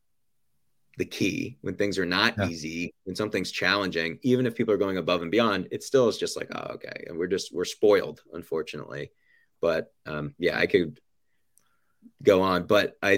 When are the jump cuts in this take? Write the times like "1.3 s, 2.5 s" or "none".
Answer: none